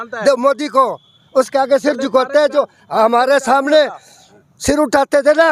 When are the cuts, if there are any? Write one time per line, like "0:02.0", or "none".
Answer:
none